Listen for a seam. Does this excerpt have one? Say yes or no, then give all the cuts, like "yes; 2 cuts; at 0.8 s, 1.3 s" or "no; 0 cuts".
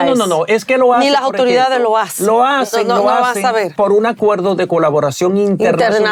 no; 0 cuts